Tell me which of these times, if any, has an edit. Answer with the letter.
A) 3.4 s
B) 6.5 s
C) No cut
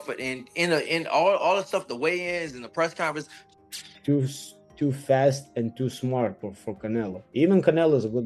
A